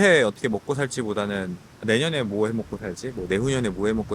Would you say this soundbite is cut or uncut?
uncut